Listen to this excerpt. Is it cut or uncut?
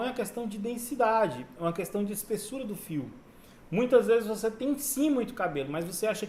uncut